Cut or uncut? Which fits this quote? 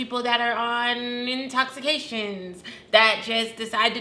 uncut